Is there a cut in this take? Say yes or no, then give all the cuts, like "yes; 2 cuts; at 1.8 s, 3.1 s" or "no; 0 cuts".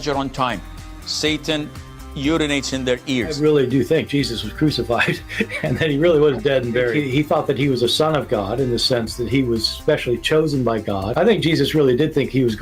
yes; 1 cut; at 5.5 s